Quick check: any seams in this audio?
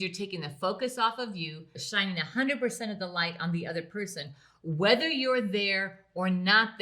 yes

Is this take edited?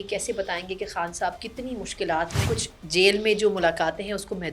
yes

